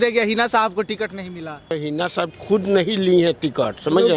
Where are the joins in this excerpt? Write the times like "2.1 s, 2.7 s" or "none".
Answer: 1.8 s